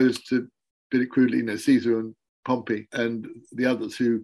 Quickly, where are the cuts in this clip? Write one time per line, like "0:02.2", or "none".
0:02.9